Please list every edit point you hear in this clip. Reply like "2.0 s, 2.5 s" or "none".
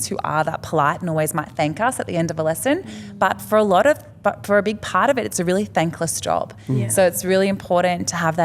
none